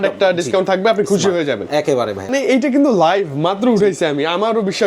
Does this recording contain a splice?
yes; 1 cut; at 2.3 s

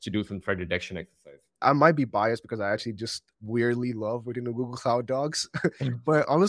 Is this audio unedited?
no; 2 cuts; at 1.6 s, 3.2 s

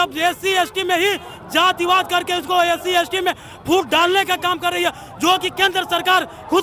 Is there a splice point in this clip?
no; 0 cuts

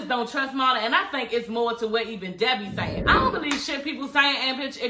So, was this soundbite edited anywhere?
yes; 1 cut; at 3.0 s

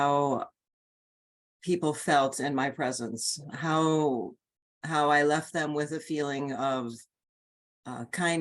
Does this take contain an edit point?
no; 0 cuts

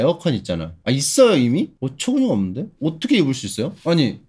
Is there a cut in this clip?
yes; 1 cut; at 1.7 s

